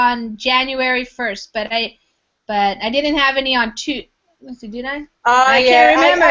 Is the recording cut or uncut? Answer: cut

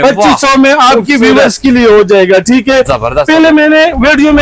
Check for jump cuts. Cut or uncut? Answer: uncut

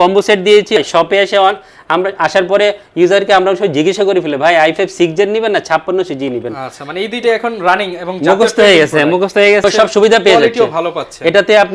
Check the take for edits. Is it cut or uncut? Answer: cut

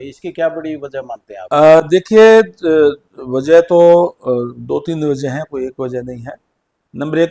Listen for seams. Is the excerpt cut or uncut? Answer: uncut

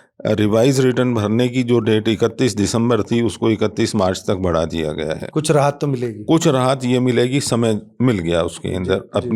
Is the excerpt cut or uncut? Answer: uncut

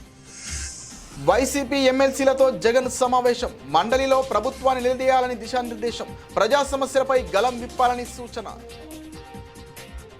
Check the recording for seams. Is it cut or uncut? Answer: uncut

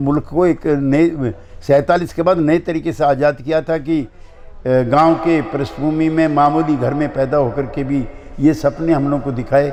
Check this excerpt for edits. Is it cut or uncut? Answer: uncut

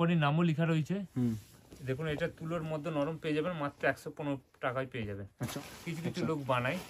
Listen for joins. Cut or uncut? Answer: cut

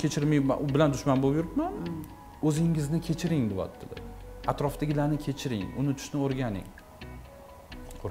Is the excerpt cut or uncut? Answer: cut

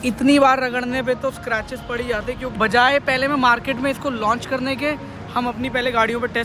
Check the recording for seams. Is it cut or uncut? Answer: cut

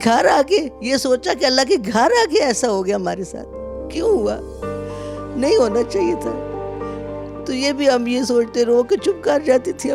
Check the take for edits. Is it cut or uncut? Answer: cut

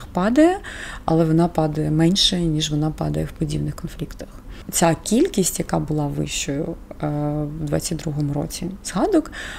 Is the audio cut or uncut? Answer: cut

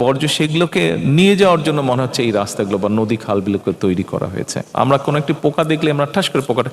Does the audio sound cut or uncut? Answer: cut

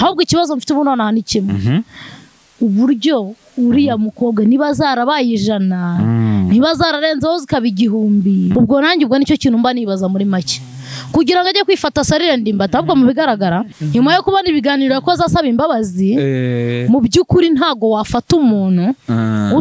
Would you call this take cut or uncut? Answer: uncut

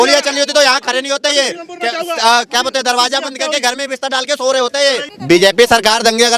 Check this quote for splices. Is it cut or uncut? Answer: cut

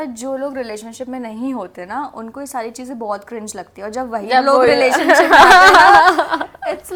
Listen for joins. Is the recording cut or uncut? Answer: uncut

